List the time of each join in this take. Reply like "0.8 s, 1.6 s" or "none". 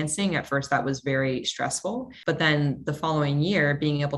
2.1 s